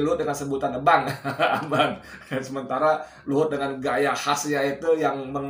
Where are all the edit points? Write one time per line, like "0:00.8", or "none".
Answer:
none

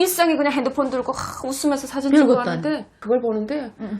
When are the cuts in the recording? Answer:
0:03.0

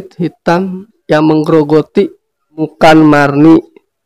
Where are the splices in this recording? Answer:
0:02.7

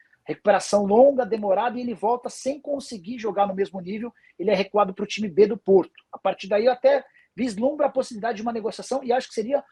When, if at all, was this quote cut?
none

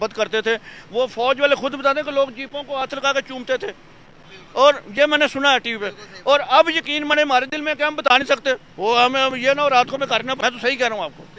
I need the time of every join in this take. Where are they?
0:10.4

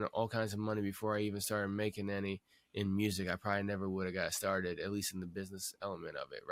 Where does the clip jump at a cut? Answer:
none

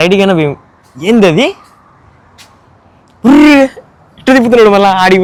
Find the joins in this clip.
none

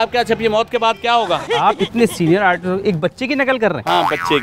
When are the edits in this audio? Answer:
0:01.5

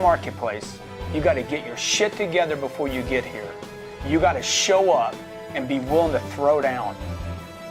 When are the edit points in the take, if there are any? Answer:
none

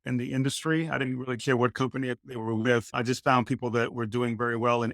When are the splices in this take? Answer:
0:02.9

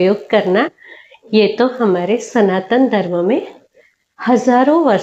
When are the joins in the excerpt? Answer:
none

